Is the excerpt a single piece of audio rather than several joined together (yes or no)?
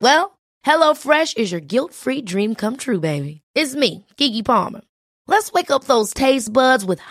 yes